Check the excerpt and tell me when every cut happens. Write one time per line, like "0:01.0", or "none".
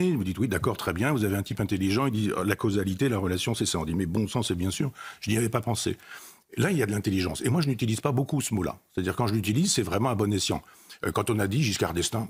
none

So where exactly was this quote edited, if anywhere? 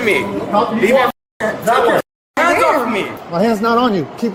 none

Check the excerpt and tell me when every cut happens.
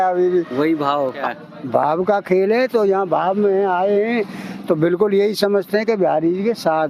0:01.2

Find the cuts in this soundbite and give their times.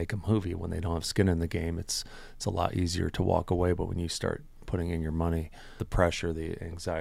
0:05.8

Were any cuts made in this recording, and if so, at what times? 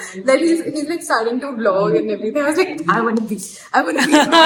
none

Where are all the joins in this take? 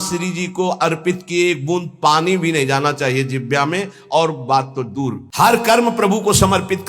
0:05.2

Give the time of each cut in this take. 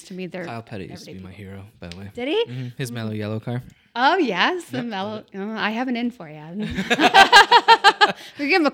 none

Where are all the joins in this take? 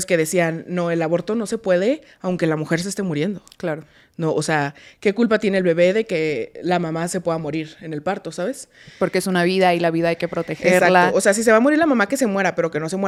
none

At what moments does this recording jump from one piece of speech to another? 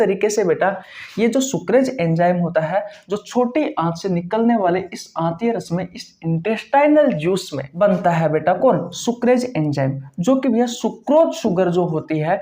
0:07.6

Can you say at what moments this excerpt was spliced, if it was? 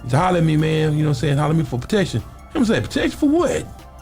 0:02.1

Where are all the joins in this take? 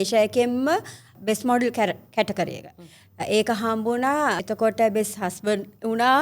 0:01.1
0:04.4

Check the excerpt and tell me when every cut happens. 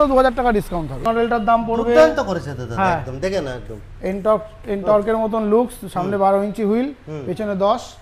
0:01.0

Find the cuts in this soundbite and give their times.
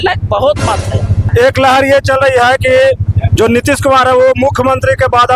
0:01.3

